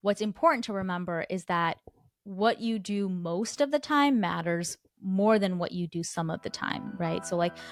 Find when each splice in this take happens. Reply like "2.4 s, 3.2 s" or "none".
none